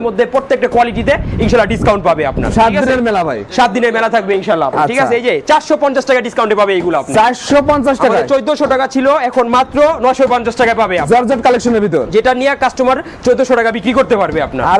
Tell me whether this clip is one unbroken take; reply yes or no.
yes